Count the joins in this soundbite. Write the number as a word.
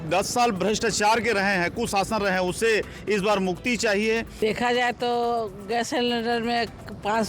one